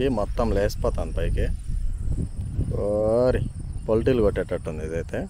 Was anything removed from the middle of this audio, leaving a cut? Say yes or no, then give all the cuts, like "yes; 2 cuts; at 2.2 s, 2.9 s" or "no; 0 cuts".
no; 0 cuts